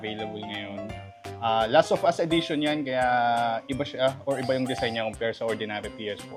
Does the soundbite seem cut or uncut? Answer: uncut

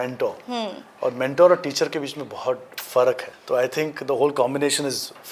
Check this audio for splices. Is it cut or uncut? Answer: cut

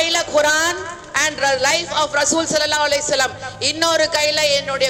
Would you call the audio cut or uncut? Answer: uncut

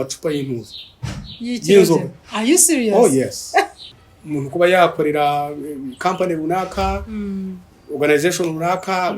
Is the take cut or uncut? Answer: cut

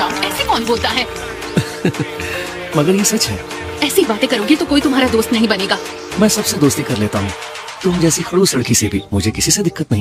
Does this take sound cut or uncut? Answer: uncut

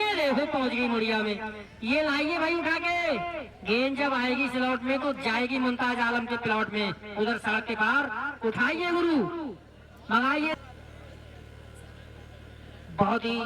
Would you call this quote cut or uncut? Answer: cut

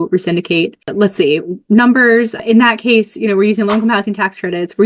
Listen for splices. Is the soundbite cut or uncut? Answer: uncut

